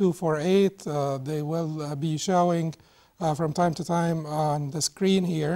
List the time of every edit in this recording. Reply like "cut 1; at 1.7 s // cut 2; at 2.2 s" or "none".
cut 1; at 2.3 s